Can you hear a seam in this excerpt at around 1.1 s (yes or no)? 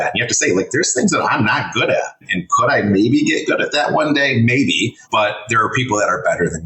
no